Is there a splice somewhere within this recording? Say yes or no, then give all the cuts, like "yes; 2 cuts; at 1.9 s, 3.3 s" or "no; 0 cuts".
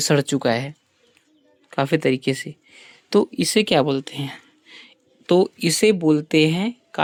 no; 0 cuts